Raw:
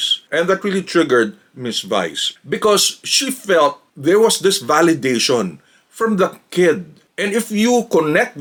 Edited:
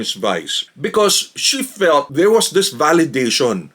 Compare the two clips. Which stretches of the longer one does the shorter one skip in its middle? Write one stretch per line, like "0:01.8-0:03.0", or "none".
0:03.8-0:04.0

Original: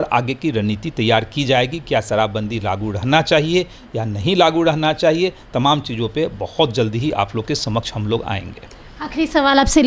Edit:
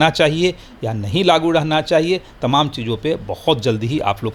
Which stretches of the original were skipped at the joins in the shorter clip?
none

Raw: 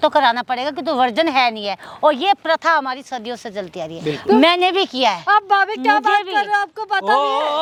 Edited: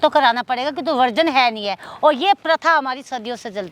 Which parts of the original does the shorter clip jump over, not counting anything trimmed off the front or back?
none

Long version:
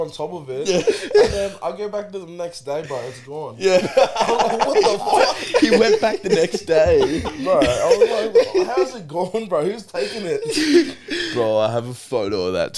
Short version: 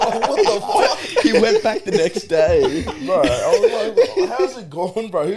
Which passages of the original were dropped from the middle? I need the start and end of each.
none

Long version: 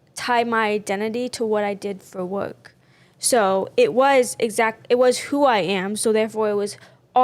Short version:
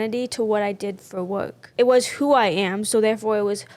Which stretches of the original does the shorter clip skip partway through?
0:02.7-0:04.8

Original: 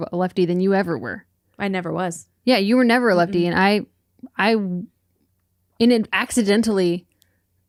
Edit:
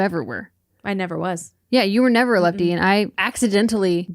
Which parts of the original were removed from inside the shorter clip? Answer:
0:04.0-0:06.2

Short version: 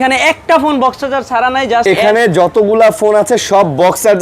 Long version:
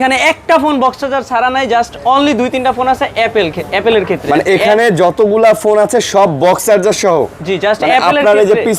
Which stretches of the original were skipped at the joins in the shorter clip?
0:01.8-0:04.5

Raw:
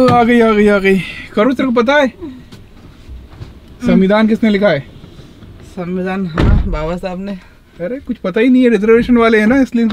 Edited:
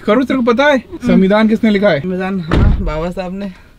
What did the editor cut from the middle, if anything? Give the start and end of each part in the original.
0:02.2-0:03.7
0:04.8-0:05.9

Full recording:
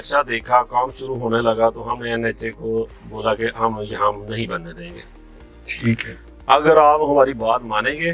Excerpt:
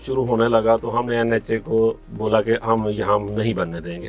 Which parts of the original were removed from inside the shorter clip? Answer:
none

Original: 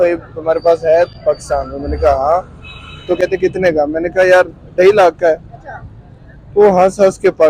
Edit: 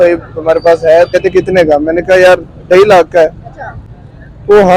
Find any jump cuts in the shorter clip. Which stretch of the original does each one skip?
0:01.1-0:03.2

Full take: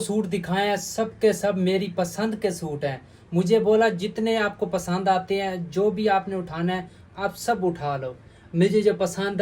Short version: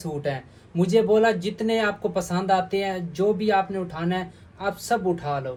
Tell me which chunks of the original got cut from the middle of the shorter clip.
none

